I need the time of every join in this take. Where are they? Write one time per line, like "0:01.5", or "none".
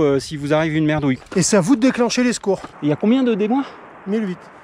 0:01.2
0:02.7